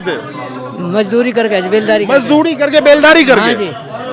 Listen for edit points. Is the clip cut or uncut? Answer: uncut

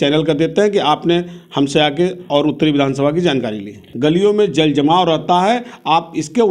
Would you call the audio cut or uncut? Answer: cut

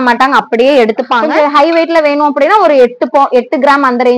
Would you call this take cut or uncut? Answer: cut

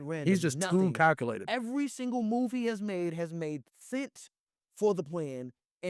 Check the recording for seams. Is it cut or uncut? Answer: uncut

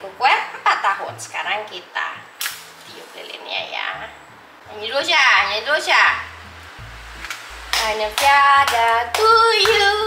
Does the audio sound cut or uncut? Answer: cut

